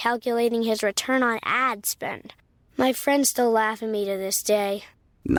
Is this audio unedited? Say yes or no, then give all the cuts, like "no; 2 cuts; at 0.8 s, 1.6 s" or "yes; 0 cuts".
yes; 0 cuts